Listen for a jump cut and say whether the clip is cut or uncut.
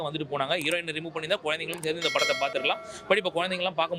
uncut